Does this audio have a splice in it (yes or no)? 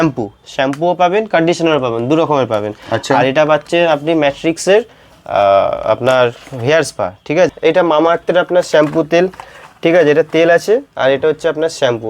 yes